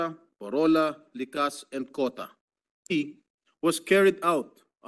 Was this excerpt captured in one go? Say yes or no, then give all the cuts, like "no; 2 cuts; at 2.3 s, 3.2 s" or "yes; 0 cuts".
no; 1 cut; at 2.9 s